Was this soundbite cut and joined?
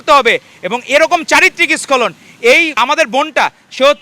yes; 1 cut; at 2.7 s

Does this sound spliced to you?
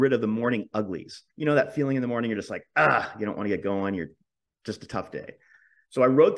yes; 1 cut; at 1.2 s

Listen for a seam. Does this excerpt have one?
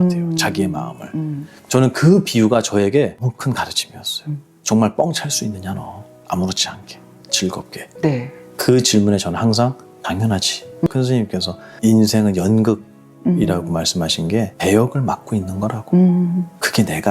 yes; 1 cut; at 10.9 s

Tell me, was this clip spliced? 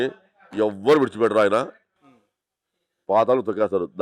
no; 0 cuts

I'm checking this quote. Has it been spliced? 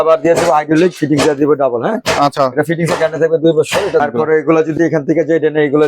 yes; 1 cut; at 4.0 s

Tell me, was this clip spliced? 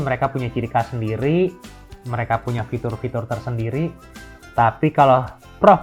no; 0 cuts

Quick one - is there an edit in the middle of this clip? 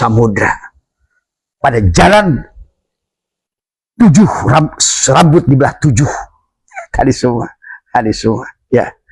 no; 0 cuts

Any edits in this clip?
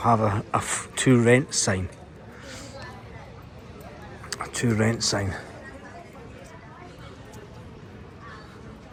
no; 0 cuts

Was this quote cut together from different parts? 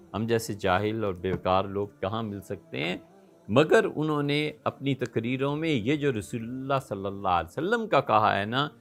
no; 0 cuts

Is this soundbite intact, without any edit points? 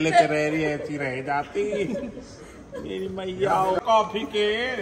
no; 1 cut; at 3.8 s

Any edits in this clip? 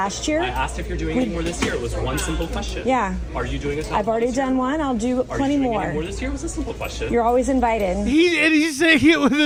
no; 0 cuts

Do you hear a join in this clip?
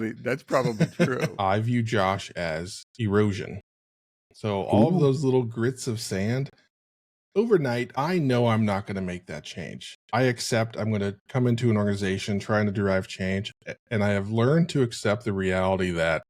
yes; 2 cuts; at 1.3 s, 7.9 s

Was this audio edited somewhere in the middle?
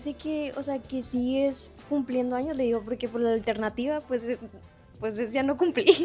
no; 0 cuts

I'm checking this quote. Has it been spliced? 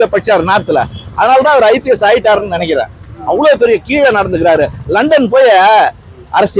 no; 0 cuts

